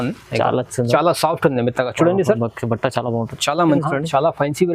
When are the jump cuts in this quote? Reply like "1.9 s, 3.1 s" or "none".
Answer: 3.8 s